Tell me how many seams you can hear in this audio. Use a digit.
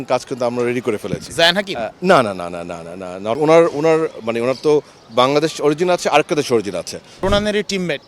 2